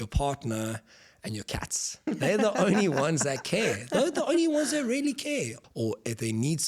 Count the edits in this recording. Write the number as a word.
one